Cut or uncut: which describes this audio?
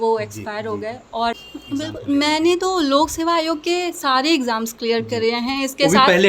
cut